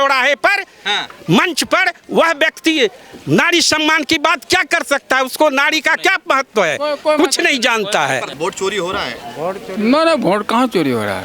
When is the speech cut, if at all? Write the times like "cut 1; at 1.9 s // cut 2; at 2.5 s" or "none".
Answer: none